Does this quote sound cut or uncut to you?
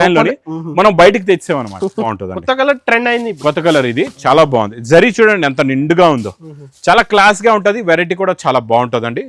cut